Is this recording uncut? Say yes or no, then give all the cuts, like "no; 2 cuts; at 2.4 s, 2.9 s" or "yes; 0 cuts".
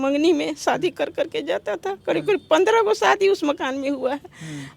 yes; 0 cuts